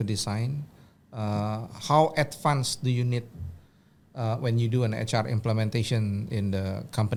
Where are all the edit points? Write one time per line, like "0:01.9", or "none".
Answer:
none